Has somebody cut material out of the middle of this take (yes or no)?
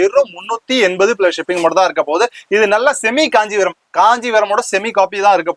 no